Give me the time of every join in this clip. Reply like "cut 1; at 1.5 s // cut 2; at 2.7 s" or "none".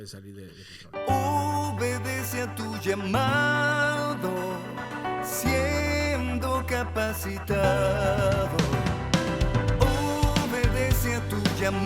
cut 1; at 0.9 s

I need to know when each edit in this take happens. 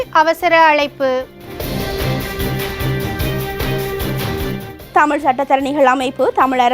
cut 1; at 1.6 s // cut 2; at 4.7 s

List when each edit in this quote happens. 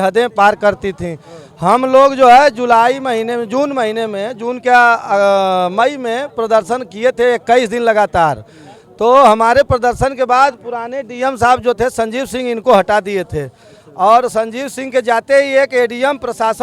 none

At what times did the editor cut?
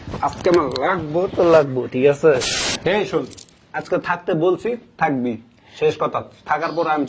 cut 1; at 2.7 s

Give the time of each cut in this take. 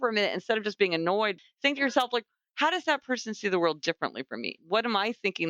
cut 1; at 1.3 s // cut 2; at 4.6 s

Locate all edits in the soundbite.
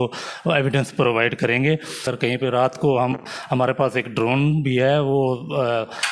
cut 1; at 2.1 s

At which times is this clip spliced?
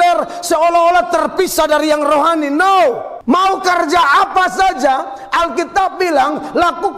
cut 1; at 3.1 s

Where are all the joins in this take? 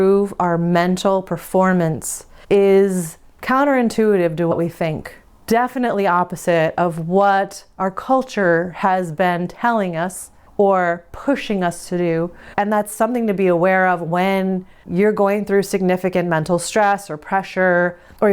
cut 1; at 12.5 s

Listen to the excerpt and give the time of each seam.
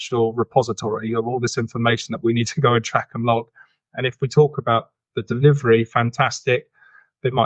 none

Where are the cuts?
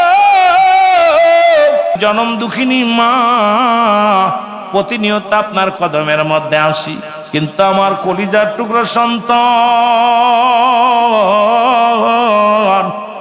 cut 1; at 1.9 s

